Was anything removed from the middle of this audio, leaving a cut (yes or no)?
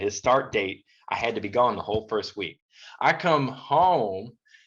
yes